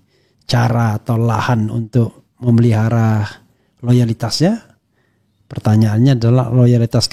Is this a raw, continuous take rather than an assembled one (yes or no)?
yes